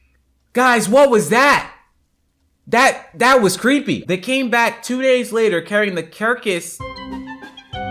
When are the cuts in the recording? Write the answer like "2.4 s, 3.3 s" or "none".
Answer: 4.0 s, 6.7 s